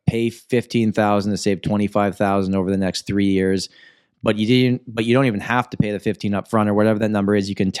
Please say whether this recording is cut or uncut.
uncut